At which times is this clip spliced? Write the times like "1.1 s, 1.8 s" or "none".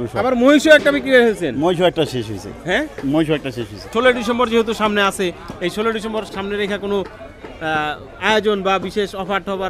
3.9 s, 6.3 s